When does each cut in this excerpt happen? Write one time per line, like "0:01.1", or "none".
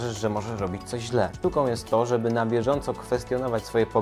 0:01.4